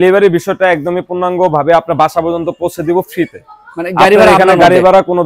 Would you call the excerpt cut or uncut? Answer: uncut